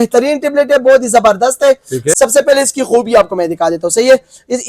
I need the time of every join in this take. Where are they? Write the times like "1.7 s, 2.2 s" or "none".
2.1 s